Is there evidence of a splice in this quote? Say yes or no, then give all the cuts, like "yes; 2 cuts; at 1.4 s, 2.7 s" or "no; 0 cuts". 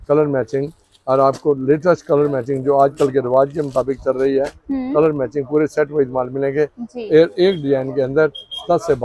no; 0 cuts